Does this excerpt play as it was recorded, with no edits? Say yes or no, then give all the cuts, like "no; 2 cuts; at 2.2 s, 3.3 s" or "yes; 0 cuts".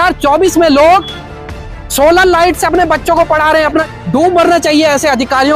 no; 1 cut; at 3.9 s